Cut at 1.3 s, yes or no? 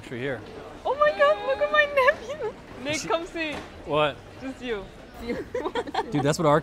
no